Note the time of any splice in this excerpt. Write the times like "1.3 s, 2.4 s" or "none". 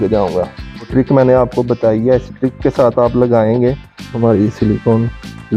0.9 s, 4.1 s